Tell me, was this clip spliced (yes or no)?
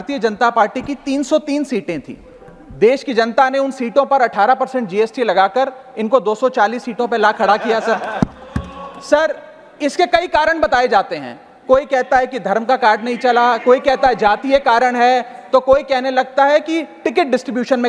no